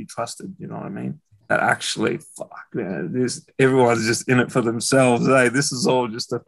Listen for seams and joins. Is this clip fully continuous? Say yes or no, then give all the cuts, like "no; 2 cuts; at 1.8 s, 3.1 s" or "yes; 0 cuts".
no; 1 cut; at 1.3 s